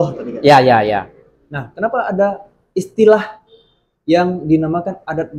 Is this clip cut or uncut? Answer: uncut